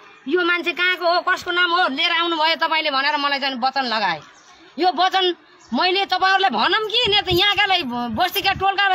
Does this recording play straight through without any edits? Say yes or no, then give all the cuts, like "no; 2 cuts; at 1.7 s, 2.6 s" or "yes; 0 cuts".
yes; 0 cuts